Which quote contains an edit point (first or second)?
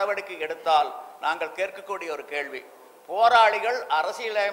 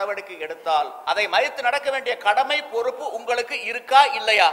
second